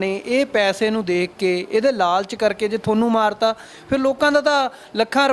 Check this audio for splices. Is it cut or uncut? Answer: uncut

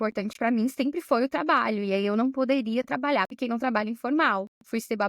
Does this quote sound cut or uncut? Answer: cut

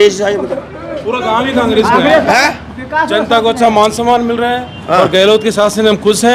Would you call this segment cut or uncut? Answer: uncut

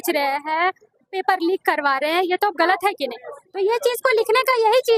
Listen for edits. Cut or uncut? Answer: uncut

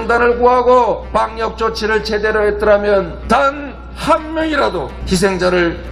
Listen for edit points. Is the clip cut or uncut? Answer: cut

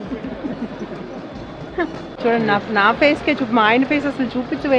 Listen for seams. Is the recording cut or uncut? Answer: cut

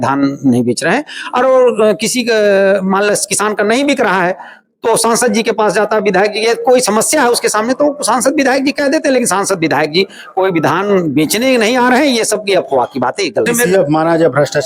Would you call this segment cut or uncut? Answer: cut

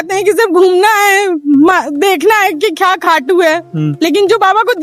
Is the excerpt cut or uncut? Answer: uncut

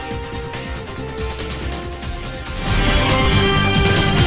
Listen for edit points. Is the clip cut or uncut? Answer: cut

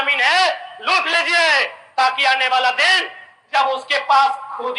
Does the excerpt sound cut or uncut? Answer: uncut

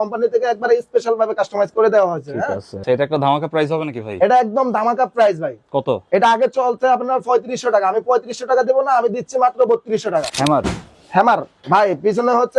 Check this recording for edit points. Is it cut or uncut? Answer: cut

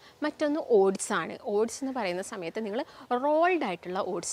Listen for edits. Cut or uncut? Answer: uncut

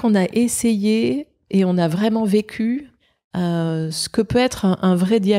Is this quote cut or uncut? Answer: uncut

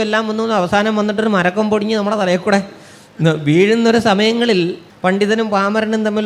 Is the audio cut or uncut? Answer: cut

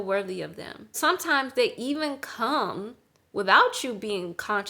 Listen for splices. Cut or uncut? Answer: cut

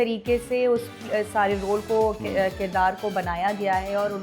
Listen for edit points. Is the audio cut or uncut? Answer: uncut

